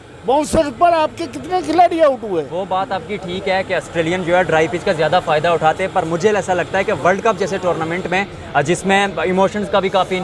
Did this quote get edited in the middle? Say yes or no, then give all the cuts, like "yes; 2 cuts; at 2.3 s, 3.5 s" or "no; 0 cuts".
no; 0 cuts